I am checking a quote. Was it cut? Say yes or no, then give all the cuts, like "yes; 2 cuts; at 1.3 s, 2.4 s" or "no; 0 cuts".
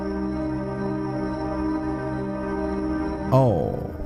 no; 0 cuts